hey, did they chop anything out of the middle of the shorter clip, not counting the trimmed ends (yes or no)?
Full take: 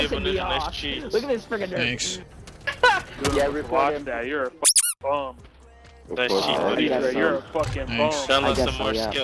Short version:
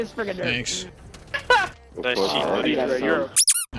yes